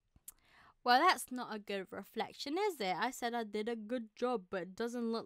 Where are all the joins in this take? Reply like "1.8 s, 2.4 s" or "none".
none

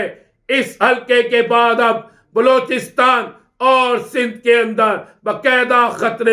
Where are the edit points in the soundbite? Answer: none

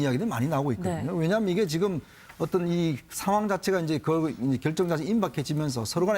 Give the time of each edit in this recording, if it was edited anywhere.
2.4 s

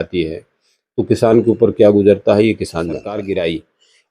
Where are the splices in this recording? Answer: 3.1 s

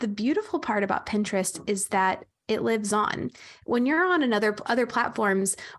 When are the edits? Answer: none

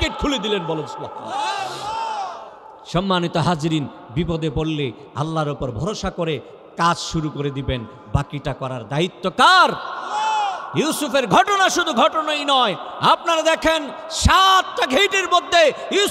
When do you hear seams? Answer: none

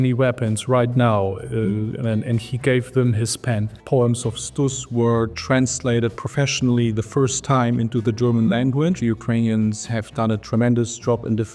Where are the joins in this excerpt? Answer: 3.7 s, 9.0 s

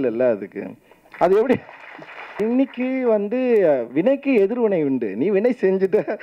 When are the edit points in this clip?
2.4 s

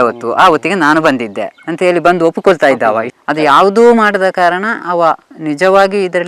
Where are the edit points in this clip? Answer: 3.1 s

